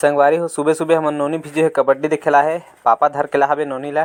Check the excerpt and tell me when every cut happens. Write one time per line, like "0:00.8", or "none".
none